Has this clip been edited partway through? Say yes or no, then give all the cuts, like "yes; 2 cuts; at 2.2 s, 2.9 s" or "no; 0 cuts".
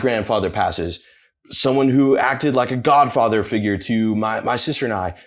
no; 0 cuts